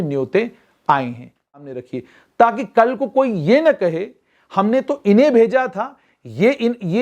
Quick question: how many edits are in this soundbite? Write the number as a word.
one